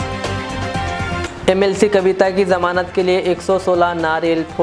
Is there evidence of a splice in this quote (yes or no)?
no